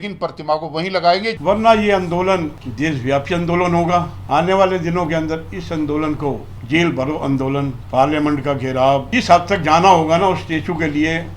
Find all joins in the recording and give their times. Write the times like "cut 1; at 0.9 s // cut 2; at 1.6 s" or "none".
cut 1; at 1.4 s // cut 2; at 2.6 s // cut 3; at 4.2 s // cut 4; at 6.5 s // cut 5; at 7.8 s // cut 6; at 9.1 s